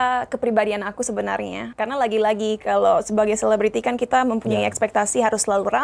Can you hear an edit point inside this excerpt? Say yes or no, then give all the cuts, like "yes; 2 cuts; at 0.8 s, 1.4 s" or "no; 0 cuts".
yes; 1 cut; at 1.6 s